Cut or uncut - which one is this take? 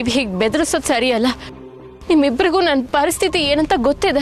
uncut